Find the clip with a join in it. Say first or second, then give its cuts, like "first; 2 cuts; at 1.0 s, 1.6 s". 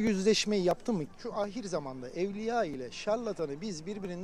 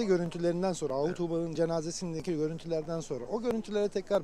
first; 1 cut; at 1.1 s